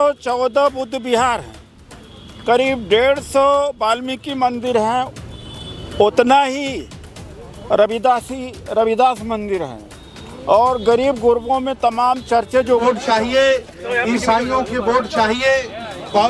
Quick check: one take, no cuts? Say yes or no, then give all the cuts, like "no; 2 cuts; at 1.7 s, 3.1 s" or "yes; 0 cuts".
no; 1 cut; at 12.8 s